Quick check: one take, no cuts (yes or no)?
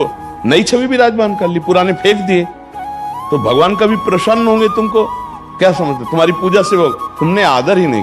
yes